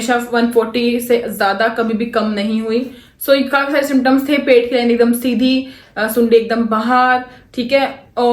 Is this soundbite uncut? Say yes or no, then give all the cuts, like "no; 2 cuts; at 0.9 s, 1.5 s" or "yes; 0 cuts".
yes; 0 cuts